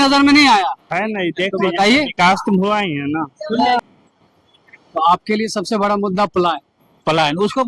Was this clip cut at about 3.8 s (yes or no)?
yes